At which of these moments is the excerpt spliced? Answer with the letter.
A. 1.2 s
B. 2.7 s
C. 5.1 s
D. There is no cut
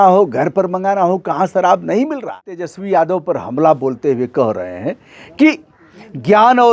B